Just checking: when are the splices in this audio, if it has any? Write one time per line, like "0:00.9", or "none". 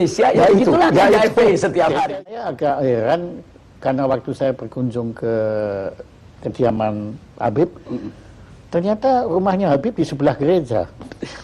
0:02.3